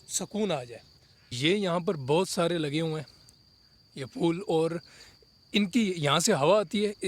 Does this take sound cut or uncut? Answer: cut